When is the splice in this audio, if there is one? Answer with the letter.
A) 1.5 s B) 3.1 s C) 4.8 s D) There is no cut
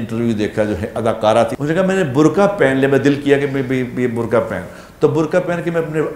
A